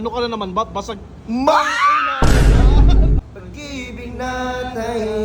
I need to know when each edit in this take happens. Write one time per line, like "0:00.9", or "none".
0:03.2